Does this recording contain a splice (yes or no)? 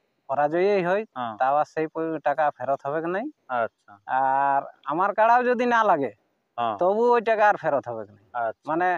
no